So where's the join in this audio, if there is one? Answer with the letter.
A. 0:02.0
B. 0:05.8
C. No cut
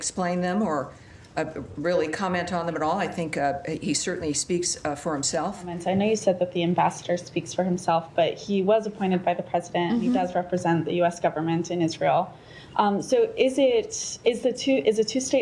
B